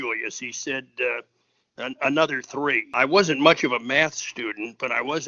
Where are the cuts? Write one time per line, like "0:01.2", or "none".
0:02.9